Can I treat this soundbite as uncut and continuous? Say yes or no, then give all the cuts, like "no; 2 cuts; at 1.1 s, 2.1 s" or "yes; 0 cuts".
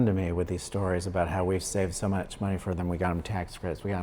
yes; 0 cuts